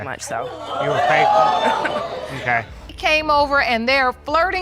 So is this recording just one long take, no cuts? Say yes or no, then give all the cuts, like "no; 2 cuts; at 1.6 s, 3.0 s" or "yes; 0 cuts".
no; 1 cut; at 2.9 s